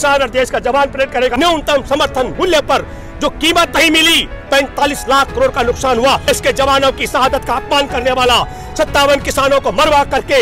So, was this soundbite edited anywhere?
yes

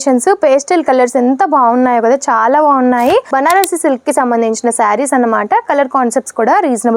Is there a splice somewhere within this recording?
yes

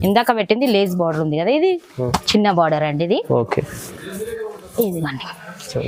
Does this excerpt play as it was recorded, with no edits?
yes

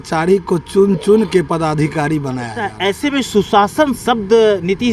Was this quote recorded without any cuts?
no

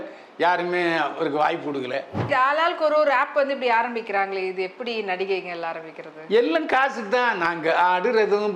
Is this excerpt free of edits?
no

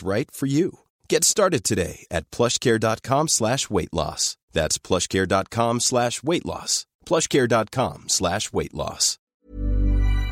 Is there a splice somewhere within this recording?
yes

